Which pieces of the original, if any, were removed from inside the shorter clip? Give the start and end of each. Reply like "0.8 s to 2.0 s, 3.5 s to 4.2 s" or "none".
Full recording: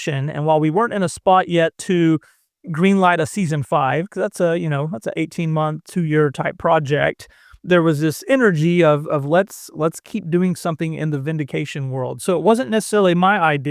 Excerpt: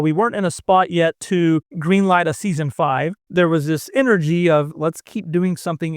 2.3 s to 2.7 s, 4.1 s to 7.5 s, 9.0 s to 9.7 s